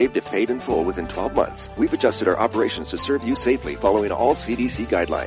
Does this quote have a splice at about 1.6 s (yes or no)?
yes